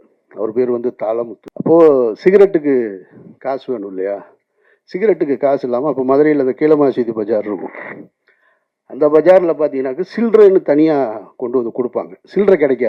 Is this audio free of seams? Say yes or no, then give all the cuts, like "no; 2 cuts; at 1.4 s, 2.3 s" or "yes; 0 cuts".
no; 1 cut; at 1.4 s